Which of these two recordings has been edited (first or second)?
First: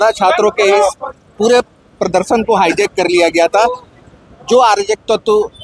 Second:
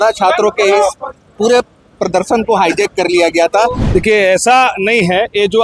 second